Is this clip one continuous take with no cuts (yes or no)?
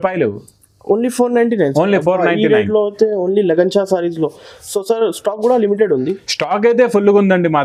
yes